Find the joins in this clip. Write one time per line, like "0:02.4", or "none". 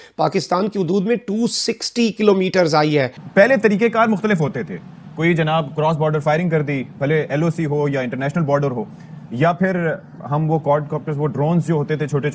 0:03.2